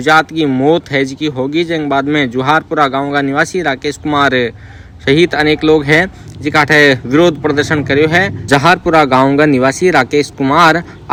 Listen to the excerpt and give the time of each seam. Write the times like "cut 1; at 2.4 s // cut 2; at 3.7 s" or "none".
none

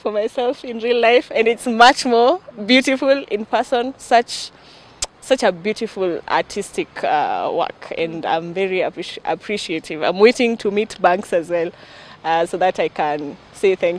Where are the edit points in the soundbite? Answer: none

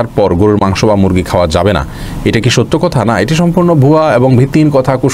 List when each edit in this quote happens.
none

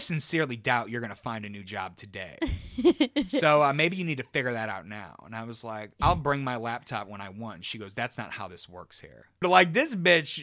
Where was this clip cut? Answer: cut 1; at 5.9 s

